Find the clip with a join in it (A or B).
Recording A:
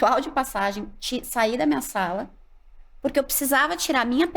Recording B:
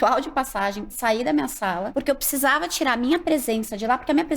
B